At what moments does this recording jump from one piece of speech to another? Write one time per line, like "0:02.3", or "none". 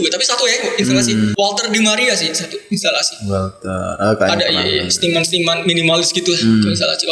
0:01.3